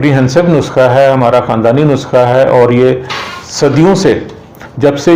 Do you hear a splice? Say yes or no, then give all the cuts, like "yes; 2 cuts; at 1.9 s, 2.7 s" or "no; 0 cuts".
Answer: no; 0 cuts